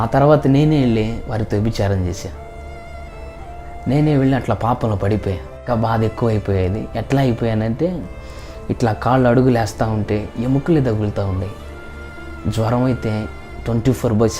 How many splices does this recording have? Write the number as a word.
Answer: one